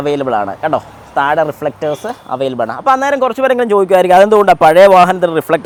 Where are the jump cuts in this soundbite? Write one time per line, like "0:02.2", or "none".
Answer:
none